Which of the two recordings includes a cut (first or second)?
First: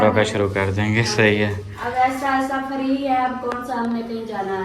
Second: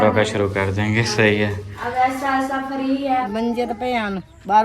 second